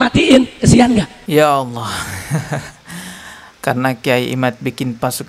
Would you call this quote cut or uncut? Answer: cut